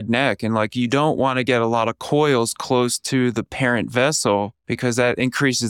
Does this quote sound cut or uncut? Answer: cut